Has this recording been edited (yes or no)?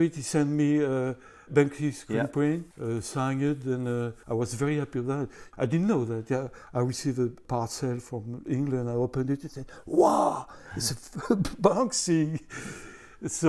yes